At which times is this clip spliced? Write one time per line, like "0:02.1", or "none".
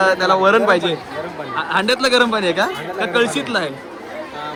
none